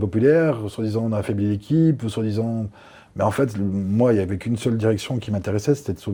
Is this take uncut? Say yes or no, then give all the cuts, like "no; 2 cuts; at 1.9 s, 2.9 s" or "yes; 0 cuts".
yes; 0 cuts